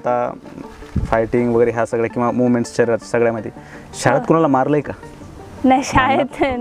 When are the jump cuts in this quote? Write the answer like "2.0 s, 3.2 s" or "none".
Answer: none

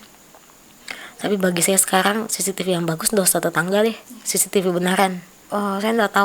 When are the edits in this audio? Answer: 5.3 s

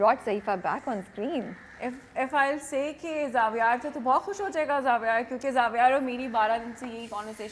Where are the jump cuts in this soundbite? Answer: none

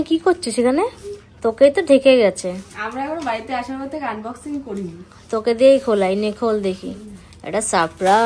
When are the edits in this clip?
none

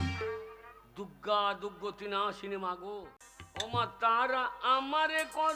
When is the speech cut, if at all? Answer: 3.1 s

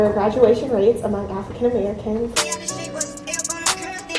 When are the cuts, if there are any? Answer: 2.3 s

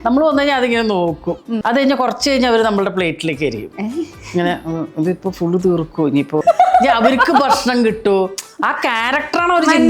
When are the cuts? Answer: 1.6 s, 6.4 s

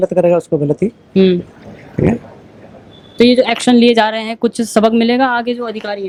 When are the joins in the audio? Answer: none

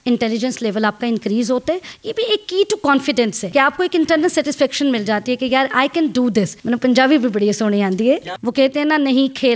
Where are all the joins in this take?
1.9 s, 3.4 s, 6.6 s, 8.3 s

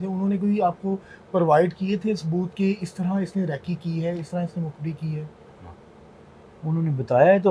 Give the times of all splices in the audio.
none

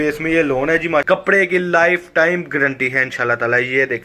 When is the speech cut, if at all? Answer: 1.0 s

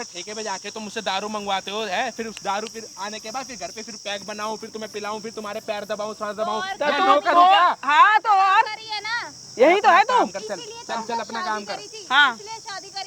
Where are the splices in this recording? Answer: none

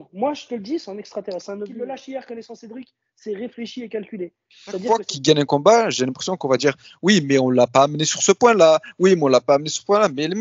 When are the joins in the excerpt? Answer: 1.7 s, 4.8 s

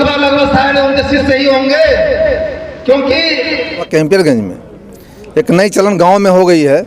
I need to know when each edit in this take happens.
3.9 s

